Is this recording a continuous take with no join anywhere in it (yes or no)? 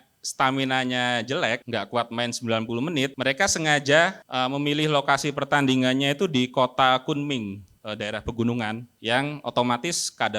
no